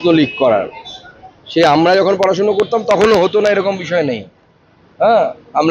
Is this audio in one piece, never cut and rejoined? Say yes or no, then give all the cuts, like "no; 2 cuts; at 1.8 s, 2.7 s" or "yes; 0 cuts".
yes; 0 cuts